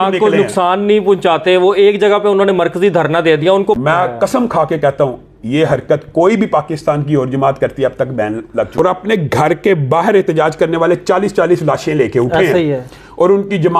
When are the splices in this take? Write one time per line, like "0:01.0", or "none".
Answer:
0:03.8
0:08.7